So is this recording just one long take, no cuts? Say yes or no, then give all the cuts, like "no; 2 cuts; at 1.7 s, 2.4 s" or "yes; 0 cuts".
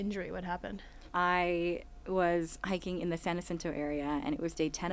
no; 1 cut; at 1.1 s